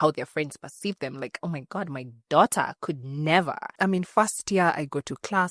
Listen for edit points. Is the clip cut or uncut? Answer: cut